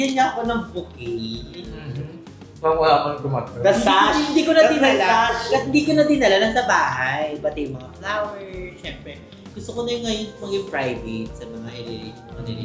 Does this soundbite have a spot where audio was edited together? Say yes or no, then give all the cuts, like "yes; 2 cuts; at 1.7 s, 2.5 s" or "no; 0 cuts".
no; 0 cuts